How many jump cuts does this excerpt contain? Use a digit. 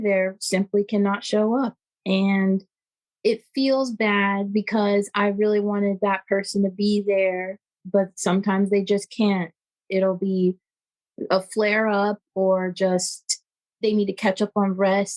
0